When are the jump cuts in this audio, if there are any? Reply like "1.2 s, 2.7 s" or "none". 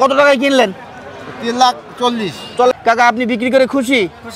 2.7 s